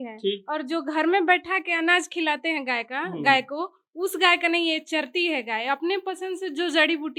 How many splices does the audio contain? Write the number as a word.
zero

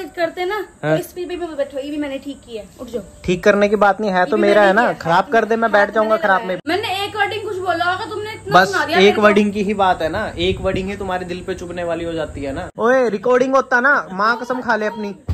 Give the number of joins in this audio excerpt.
two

